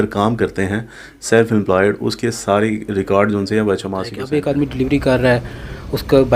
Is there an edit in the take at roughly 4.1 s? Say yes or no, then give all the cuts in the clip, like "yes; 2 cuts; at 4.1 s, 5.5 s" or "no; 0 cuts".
yes; 1 cut; at 4.1 s